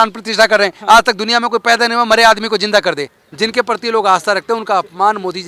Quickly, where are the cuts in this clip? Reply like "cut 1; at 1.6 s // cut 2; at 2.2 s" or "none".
cut 1; at 3.2 s